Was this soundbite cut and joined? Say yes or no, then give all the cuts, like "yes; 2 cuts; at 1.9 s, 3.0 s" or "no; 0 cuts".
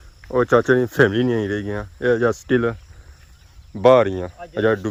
no; 0 cuts